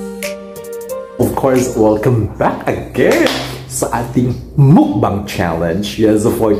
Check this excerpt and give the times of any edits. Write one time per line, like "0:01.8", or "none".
0:01.2